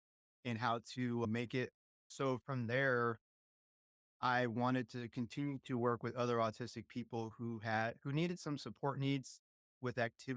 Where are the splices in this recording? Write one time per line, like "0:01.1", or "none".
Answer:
0:02.1